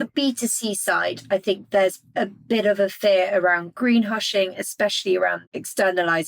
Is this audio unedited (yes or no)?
no